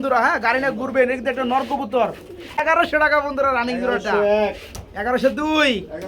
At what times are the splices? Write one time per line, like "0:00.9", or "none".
0:02.6